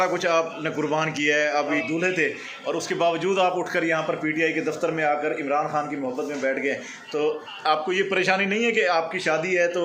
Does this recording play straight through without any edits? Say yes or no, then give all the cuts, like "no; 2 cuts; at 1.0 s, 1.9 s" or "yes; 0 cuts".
no; 1 cut; at 1.8 s